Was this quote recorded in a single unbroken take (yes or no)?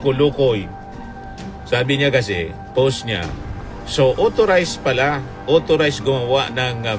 yes